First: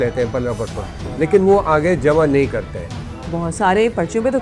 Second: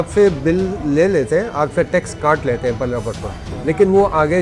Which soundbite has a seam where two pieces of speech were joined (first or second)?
first